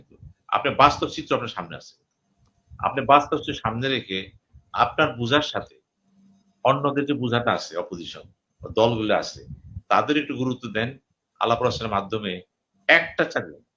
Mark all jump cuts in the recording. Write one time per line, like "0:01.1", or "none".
none